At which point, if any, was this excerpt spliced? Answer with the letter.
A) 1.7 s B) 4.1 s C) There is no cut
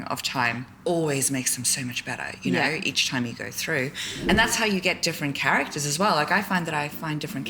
B